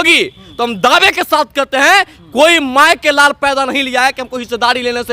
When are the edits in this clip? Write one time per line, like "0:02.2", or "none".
none